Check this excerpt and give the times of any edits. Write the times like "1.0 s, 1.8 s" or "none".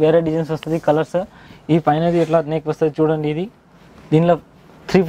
none